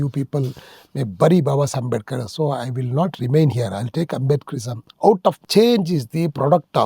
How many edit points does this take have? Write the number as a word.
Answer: one